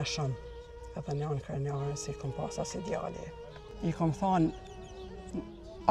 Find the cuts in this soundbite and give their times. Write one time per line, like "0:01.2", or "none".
0:03.3